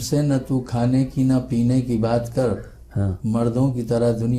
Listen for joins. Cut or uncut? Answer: uncut